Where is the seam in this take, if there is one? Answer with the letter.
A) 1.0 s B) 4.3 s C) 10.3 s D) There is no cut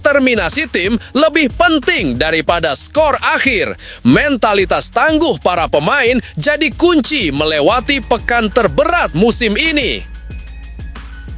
C